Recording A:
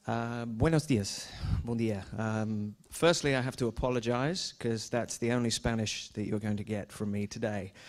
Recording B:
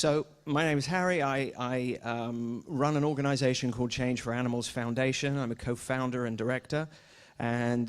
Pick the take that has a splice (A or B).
B